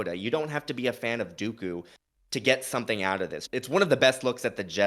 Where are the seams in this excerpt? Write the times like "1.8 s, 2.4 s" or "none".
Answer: 3.4 s